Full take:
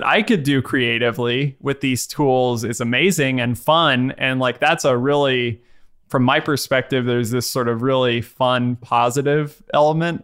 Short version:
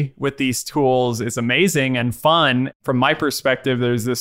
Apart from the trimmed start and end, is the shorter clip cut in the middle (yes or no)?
yes